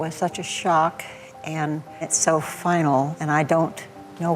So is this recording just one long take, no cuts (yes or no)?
no